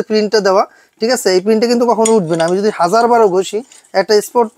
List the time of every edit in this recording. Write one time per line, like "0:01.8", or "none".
none